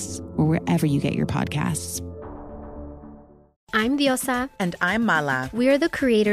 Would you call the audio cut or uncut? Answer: cut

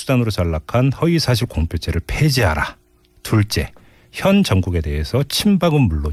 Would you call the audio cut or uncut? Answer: uncut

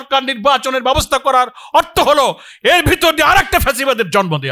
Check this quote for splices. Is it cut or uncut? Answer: uncut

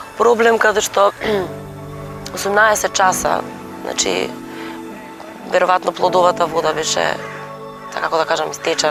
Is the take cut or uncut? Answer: uncut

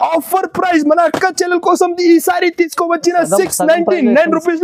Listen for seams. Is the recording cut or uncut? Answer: uncut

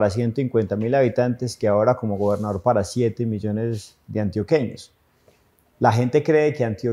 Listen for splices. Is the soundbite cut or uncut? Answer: uncut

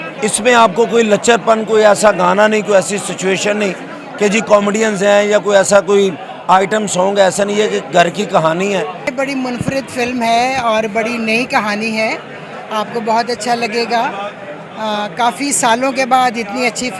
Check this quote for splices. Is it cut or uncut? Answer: cut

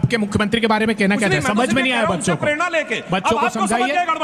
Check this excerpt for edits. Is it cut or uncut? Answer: uncut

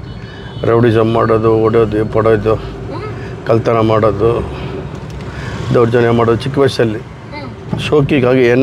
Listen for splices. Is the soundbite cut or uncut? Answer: uncut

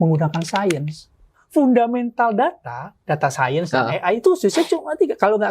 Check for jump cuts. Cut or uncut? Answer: cut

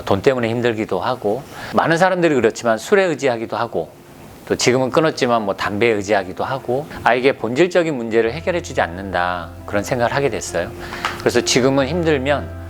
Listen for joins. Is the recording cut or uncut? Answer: cut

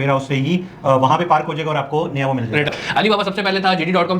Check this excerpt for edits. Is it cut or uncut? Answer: cut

